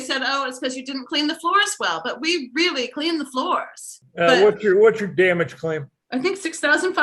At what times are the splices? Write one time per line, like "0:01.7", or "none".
0:04.0
0:05.9